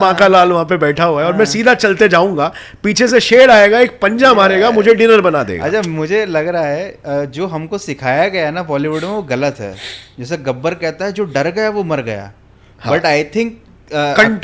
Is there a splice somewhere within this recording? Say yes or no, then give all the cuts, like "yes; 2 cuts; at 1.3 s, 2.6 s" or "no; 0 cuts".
no; 0 cuts